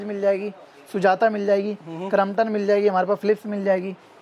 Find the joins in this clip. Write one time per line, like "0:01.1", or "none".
none